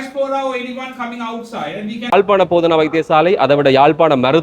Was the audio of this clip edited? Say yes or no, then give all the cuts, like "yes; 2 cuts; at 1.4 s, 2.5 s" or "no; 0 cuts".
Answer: yes; 1 cut; at 2.1 s